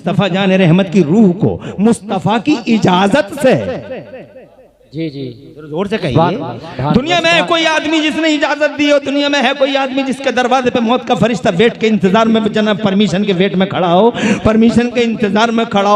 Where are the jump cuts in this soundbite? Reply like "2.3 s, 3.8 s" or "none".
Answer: none